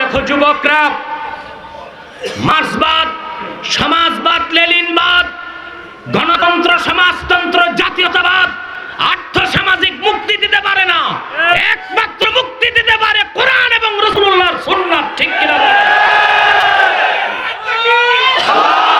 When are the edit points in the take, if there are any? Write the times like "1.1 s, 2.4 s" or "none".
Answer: 2.1 s